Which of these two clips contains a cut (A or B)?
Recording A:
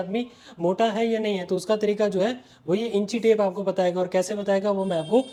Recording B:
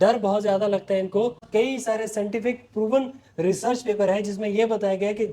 B